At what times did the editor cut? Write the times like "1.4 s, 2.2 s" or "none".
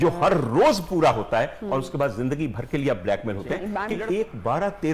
3.9 s